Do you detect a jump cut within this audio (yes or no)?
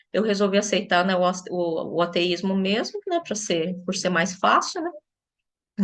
no